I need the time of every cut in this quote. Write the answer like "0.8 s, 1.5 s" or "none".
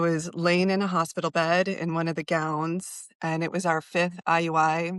none